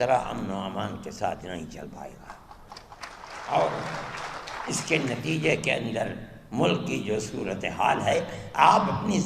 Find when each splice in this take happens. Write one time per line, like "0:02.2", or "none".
0:03.3